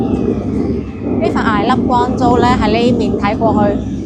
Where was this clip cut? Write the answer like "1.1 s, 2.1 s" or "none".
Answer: none